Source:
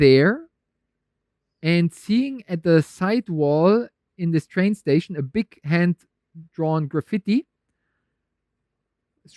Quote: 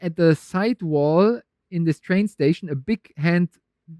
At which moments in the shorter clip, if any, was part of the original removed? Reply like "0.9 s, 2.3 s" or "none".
none